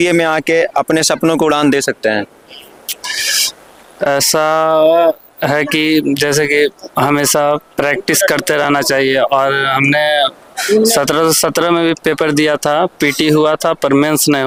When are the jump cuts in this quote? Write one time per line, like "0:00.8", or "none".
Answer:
none